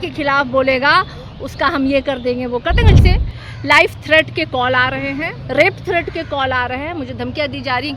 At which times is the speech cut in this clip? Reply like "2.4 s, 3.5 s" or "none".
3.0 s